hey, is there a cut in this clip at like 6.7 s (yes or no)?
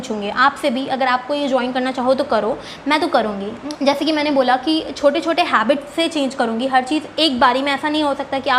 no